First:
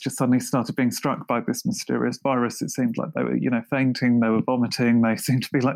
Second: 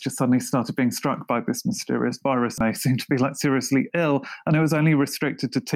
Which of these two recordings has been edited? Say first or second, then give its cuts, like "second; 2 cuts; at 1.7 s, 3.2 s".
second; 1 cut; at 2.6 s